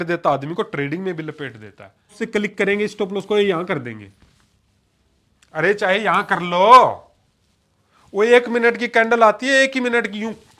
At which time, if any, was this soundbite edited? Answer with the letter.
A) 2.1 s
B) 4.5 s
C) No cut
A